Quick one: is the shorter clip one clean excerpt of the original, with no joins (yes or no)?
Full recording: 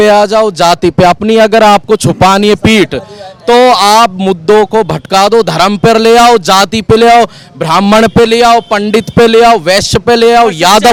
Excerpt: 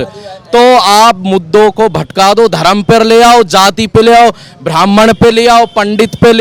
yes